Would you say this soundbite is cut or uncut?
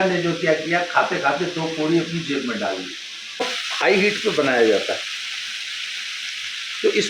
cut